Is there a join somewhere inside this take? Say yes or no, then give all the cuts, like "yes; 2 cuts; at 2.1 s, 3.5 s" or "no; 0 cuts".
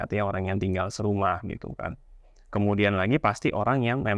no; 0 cuts